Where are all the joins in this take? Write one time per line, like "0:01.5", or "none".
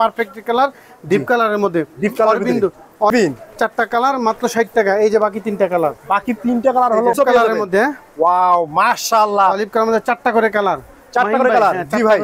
0:03.1
0:07.2

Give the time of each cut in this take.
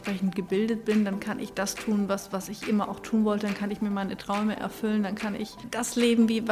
0:05.6

